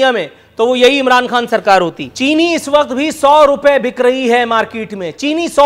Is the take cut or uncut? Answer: cut